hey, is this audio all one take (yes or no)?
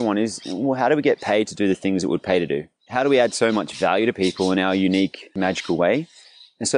no